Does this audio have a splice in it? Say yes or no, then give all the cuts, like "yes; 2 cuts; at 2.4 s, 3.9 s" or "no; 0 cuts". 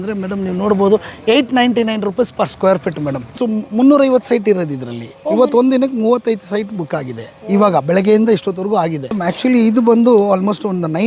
yes; 2 cuts; at 3.4 s, 9.0 s